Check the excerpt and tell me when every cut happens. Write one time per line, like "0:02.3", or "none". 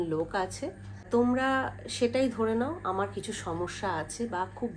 0:01.1